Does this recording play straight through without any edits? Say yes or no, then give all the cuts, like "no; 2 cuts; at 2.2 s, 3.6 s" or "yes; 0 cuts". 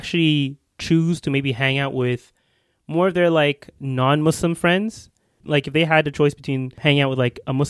no; 2 cuts; at 5.3 s, 6.7 s